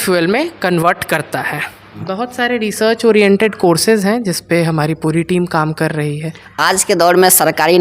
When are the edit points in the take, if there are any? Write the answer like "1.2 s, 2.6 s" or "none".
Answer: 2.0 s